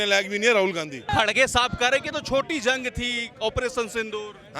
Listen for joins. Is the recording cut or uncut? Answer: cut